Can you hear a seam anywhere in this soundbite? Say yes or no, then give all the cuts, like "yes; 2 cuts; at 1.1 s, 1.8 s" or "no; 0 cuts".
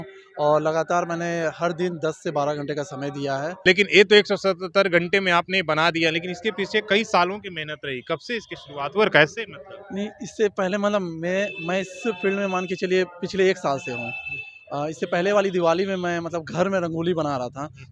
yes; 1 cut; at 3.6 s